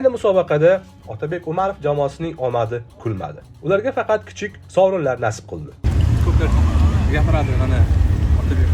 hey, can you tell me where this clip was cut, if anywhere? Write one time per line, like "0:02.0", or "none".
0:05.8